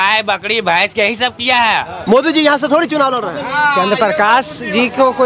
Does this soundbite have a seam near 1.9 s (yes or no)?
yes